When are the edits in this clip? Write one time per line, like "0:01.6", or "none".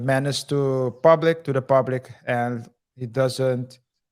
none